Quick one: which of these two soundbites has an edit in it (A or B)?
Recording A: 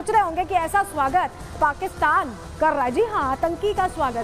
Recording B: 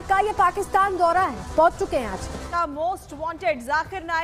B